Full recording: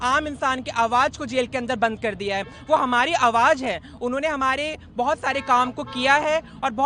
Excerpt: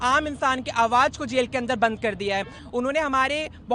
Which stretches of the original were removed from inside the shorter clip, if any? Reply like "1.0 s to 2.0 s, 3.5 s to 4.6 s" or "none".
2.6 s to 3.8 s